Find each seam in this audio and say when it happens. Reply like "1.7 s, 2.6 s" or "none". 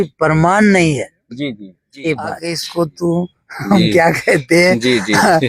2.5 s